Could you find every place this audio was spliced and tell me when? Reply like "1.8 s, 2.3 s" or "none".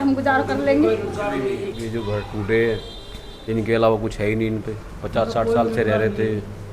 1.8 s